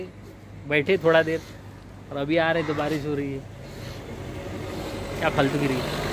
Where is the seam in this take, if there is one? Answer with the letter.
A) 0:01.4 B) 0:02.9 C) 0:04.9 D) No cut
D